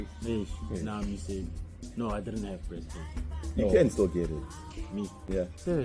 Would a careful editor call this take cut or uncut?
cut